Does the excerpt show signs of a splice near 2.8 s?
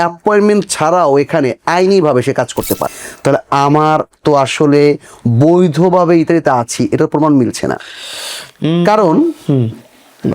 yes; 1 cut; at 2.8 s

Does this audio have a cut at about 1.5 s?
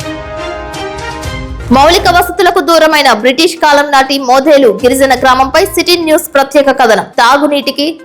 yes; 1 cut; at 1.5 s

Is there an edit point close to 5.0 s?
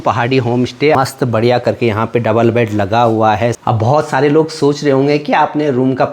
no; 2 cuts; at 0.9 s, 3.6 s

